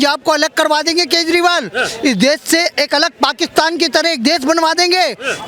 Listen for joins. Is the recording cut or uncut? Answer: uncut